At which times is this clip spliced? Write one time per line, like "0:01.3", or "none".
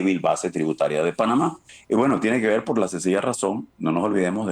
0:01.7